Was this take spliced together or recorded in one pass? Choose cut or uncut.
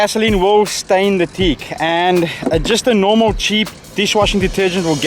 uncut